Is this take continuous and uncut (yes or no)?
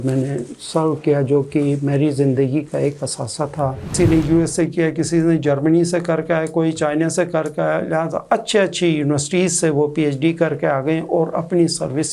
no